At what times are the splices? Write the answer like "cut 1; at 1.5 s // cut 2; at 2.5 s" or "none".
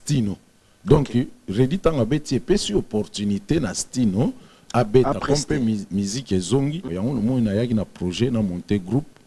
cut 1; at 6.8 s